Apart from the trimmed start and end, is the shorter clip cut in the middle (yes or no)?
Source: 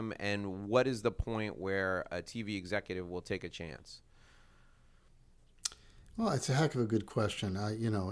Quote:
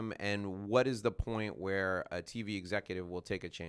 no